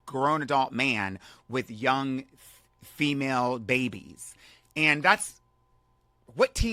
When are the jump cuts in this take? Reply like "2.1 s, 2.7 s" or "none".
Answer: none